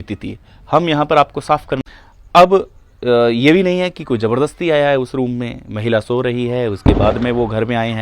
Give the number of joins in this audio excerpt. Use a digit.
1